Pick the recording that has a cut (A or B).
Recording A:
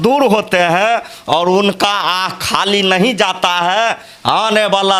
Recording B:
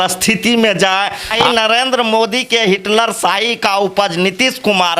B